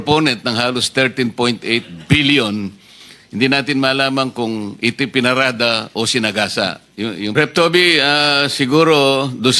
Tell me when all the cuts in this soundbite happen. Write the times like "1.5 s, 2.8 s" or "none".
7.3 s